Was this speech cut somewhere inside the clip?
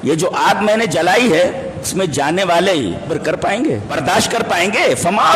yes; 3 cuts; at 1.9 s, 3.1 s, 3.9 s

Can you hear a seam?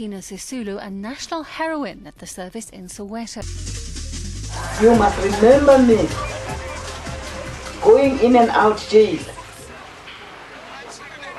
yes; 1 cut; at 3.3 s

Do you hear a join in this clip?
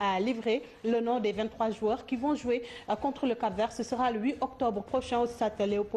yes; 1 cut; at 4.1 s

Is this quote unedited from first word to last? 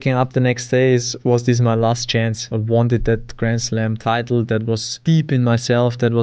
no; 2 cuts; at 2.5 s, 4.9 s

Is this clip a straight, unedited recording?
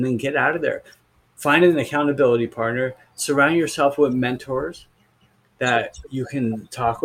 yes; 0 cuts

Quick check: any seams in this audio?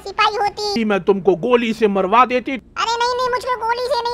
yes; 2 cuts; at 0.7 s, 2.7 s

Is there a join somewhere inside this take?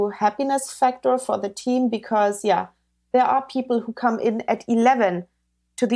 no; 0 cuts

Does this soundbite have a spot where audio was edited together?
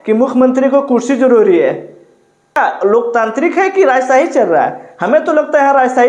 yes; 1 cut; at 2.6 s

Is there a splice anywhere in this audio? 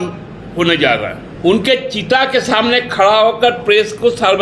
yes; 1 cut; at 1.3 s

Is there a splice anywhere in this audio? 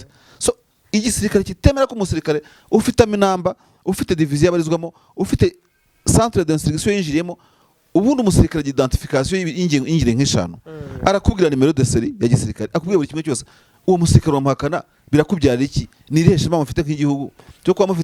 no; 0 cuts

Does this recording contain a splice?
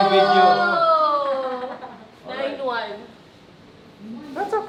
no; 0 cuts

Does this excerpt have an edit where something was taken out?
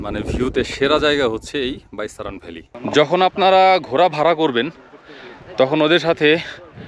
yes; 1 cut; at 2.7 s

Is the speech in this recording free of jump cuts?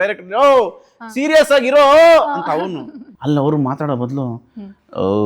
no; 1 cut; at 3.0 s

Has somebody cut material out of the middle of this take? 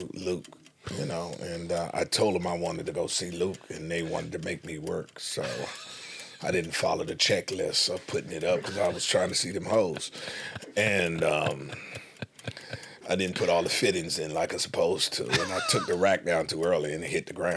no; 0 cuts

